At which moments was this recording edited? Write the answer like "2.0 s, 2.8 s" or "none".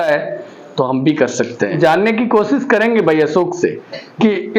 1.7 s

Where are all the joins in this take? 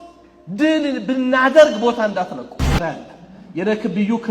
2.8 s

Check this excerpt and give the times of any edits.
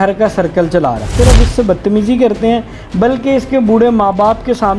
1.1 s

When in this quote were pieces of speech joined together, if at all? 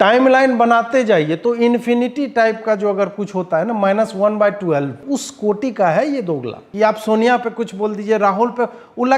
5.0 s, 6.6 s

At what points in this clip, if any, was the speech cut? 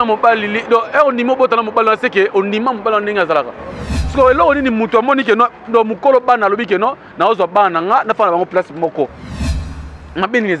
4.0 s

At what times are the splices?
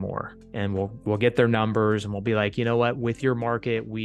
none

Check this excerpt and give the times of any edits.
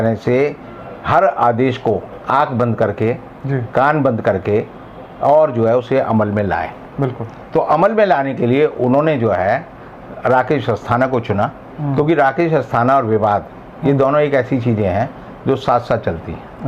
none

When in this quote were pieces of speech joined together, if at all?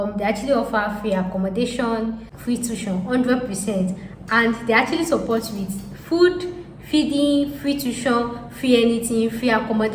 2.3 s

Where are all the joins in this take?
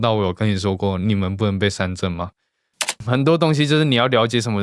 3.0 s

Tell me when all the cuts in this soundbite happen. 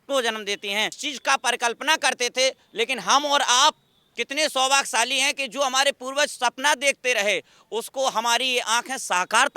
1.0 s

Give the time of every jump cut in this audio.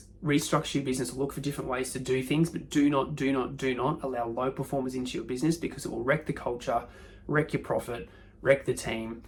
none

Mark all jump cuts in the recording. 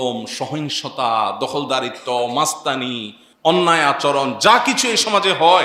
none

